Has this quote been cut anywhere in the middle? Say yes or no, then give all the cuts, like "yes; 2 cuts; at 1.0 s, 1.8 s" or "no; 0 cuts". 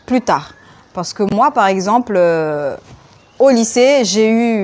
no; 0 cuts